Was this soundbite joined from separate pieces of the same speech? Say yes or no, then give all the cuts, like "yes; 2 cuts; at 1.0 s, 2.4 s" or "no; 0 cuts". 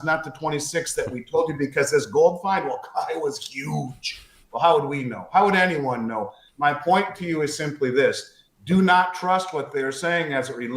no; 0 cuts